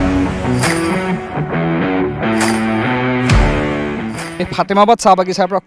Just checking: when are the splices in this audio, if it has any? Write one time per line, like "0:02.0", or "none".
0:04.3